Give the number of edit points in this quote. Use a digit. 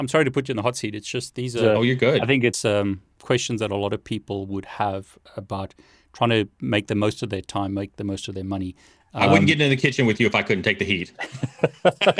0